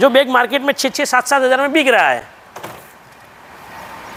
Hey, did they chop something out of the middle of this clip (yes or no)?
no